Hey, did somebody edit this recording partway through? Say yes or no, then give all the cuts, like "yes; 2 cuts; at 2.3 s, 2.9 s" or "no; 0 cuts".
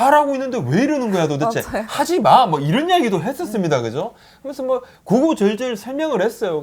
no; 0 cuts